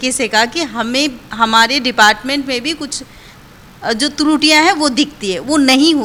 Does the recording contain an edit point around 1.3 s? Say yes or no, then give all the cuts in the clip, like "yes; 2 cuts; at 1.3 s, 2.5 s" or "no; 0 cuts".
no; 0 cuts